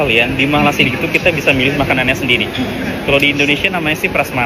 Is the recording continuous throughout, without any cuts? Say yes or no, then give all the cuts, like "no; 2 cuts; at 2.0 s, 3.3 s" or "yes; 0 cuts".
yes; 0 cuts